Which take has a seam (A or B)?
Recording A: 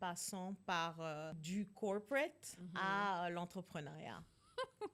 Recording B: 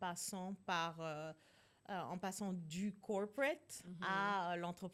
A